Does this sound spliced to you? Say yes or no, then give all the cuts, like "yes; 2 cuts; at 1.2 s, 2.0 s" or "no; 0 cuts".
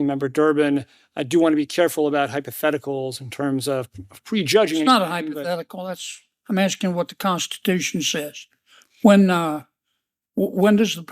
yes; 1 cut; at 8.9 s